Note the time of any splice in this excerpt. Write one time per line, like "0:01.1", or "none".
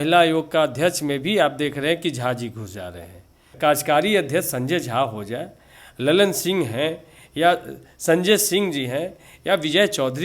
0:03.5